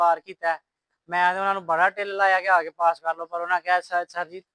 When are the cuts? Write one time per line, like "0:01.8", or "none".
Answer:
none